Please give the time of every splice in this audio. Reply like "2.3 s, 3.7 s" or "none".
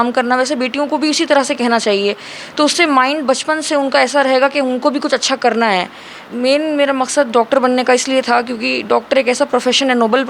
6.2 s